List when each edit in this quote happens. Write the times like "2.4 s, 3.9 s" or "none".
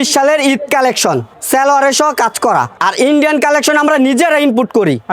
1.3 s, 2.8 s